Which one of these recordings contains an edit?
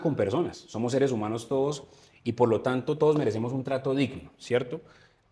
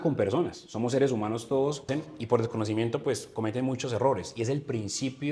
second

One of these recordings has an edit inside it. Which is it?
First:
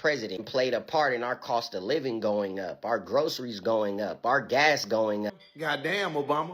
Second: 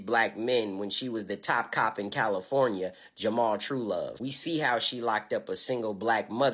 first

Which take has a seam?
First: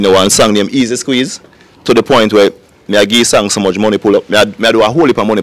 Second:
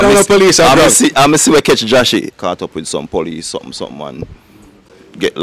second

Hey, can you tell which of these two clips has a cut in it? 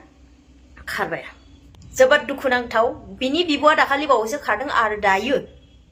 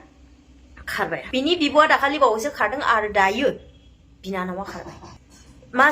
second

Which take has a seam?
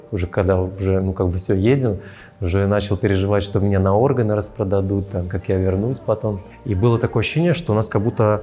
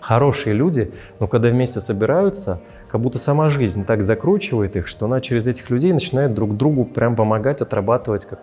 first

